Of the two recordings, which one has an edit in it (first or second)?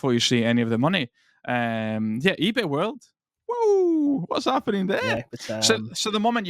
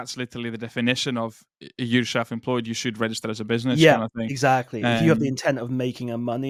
first